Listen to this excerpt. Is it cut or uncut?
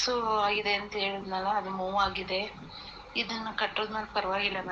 uncut